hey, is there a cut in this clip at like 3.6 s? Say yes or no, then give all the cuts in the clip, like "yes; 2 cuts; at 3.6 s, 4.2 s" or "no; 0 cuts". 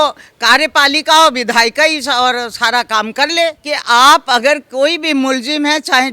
yes; 1 cut; at 3.6 s